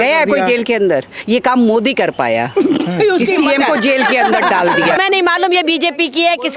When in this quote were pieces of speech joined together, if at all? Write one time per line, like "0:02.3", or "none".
0:05.0